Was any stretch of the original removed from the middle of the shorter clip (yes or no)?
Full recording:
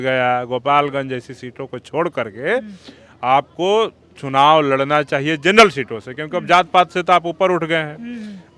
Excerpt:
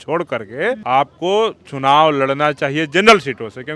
yes